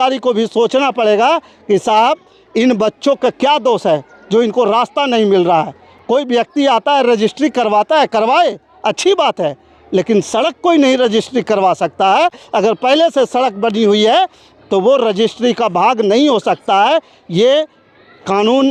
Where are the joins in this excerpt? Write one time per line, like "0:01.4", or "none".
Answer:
none